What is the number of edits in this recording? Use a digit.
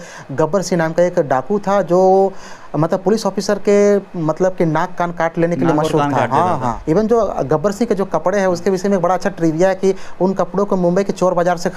1